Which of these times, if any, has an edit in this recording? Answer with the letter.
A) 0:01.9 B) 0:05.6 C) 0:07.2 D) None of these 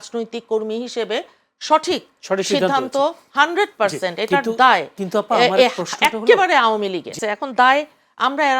C